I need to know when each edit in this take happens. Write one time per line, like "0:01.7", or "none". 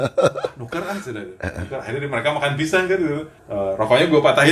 0:03.4

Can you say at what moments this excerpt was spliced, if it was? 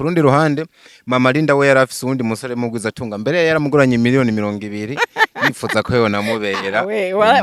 none

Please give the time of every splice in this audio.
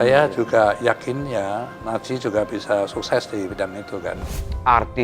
0:04.1

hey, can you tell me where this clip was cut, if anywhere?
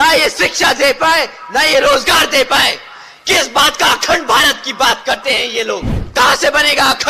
0:06.0

